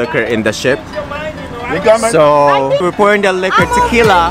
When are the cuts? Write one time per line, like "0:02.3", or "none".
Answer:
0:02.8